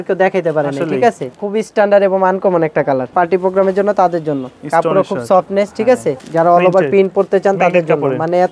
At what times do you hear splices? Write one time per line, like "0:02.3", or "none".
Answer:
0:01.4
0:03.1
0:06.2